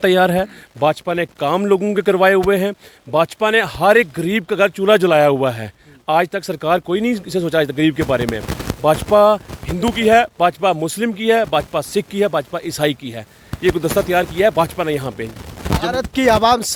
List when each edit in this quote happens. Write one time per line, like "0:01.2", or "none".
none